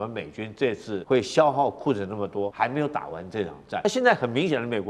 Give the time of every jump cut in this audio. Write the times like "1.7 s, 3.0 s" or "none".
0.9 s, 2.5 s, 3.8 s